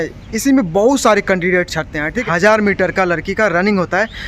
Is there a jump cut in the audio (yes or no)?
yes